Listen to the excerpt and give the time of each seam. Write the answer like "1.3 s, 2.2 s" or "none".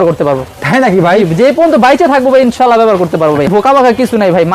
3.5 s

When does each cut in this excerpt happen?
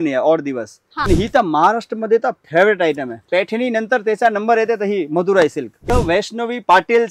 1.0 s, 5.9 s

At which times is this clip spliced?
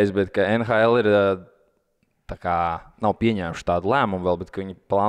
none

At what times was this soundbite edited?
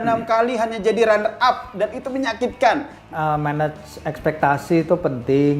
3.0 s

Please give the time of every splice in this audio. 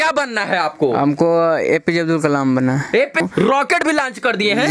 3.2 s

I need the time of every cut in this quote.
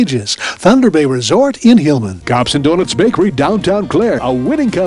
2.1 s

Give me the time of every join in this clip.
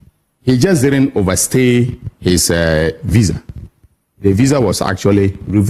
none

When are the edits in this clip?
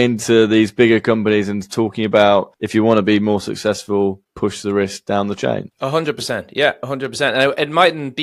none

